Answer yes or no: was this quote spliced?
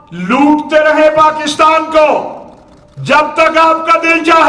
no